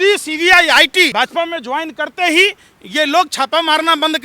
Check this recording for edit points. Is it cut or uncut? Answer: cut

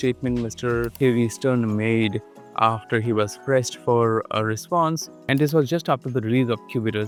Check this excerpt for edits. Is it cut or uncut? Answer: uncut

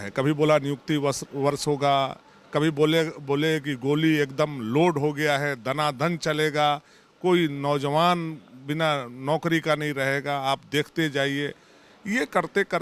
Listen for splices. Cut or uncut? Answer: uncut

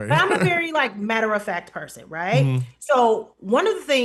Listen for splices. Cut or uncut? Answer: uncut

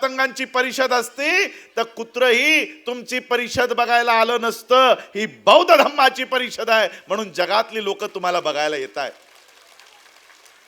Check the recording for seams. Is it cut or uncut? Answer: uncut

